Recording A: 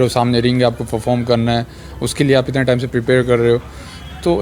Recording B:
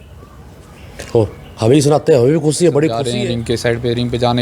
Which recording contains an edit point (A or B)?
B